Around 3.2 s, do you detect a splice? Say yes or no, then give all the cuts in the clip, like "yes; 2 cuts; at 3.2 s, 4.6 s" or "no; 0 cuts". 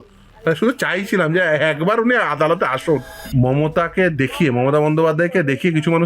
yes; 1 cut; at 3.2 s